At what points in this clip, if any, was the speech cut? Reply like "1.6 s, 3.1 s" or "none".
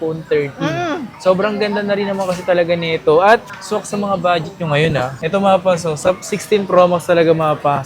5.2 s